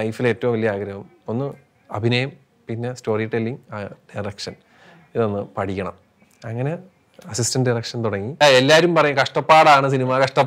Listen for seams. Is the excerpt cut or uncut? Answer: cut